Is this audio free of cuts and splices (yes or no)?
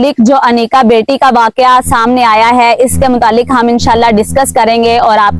yes